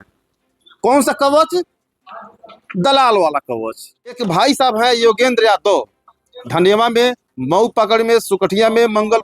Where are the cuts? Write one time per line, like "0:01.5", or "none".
0:04.2